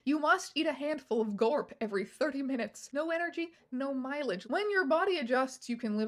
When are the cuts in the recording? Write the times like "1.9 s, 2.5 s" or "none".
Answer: 2.8 s, 4.4 s